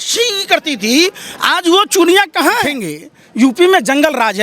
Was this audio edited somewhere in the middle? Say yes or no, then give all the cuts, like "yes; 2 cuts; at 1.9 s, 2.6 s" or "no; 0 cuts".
yes; 1 cut; at 2.7 s